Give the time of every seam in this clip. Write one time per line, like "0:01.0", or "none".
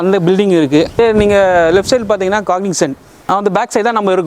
0:01.0
0:03.1